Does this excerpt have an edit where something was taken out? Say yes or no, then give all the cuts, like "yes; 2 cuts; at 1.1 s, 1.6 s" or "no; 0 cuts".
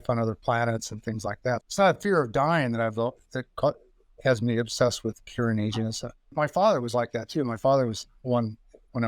yes; 2 cuts; at 1.6 s, 6.3 s